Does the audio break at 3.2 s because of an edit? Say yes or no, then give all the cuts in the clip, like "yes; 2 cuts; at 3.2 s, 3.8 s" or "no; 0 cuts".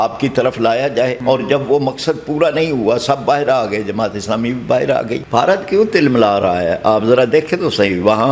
no; 2 cuts; at 1.2 s, 5.2 s